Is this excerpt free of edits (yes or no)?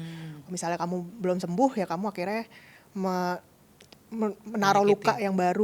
yes